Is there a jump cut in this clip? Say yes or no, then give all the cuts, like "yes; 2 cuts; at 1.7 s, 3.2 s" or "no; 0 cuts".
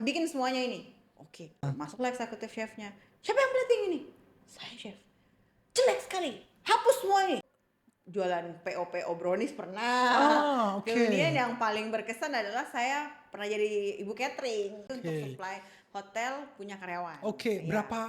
yes; 3 cuts; at 1.6 s, 7.4 s, 14.9 s